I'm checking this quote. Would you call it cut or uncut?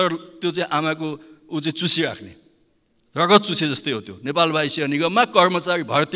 uncut